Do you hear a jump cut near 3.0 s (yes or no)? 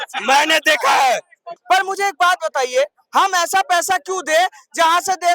no